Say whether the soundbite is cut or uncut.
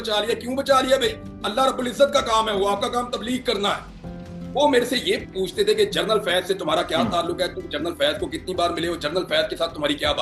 cut